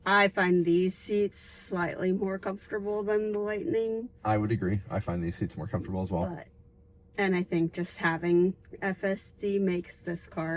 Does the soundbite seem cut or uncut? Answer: uncut